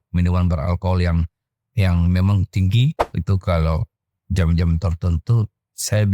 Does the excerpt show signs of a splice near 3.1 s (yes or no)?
yes